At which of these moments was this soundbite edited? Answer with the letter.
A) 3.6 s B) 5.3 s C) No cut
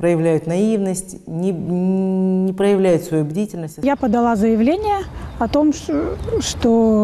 A